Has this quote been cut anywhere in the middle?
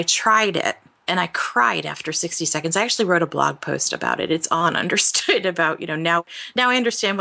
yes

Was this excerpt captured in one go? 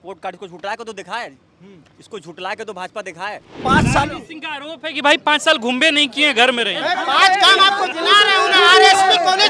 no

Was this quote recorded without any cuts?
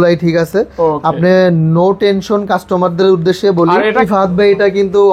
no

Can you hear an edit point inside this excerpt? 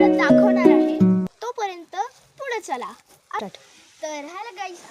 yes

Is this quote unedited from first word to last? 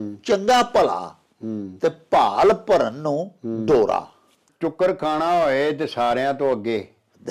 no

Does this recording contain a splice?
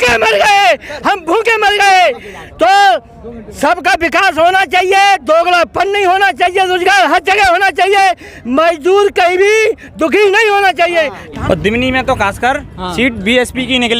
yes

